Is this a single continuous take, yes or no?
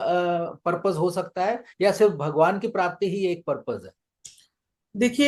yes